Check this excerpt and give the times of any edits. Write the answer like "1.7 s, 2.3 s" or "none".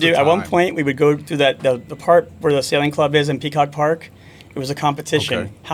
none